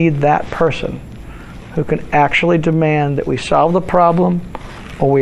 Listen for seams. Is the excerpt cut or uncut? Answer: uncut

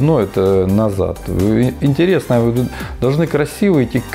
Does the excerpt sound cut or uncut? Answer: uncut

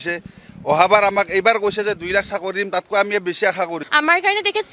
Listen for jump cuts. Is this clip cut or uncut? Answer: cut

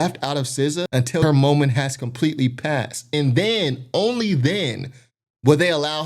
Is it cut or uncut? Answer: cut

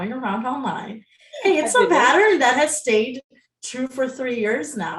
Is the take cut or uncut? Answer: uncut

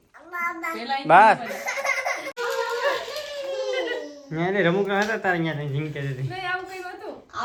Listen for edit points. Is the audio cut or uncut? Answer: uncut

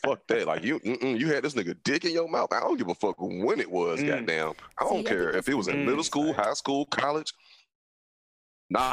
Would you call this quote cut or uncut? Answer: uncut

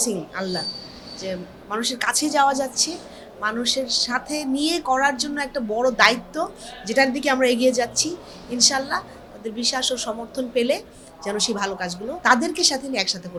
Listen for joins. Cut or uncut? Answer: uncut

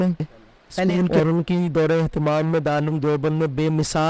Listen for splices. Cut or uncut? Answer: cut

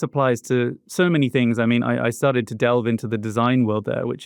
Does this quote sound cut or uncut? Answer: uncut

